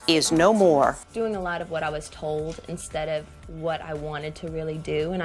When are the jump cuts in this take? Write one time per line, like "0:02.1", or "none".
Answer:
0:01.1